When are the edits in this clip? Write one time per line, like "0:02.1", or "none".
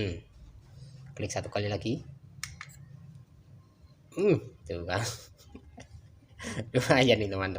none